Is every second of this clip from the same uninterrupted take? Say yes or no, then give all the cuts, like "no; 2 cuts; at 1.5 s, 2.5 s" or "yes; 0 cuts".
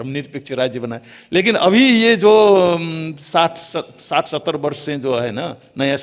yes; 0 cuts